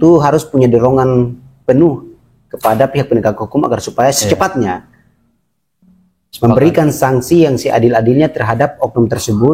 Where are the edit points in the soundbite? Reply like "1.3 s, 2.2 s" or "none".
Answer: none